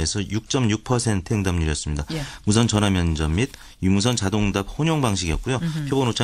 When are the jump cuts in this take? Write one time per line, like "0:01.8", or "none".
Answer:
0:04.2

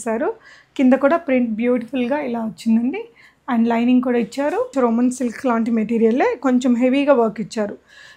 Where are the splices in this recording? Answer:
0:04.7

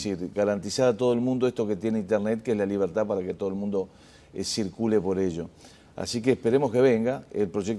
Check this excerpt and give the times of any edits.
0:02.2

